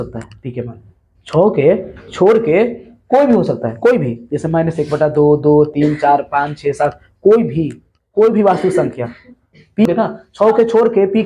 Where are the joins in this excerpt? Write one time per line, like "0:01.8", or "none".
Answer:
0:09.8